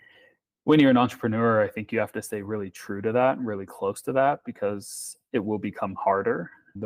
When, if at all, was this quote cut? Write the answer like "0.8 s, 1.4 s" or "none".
none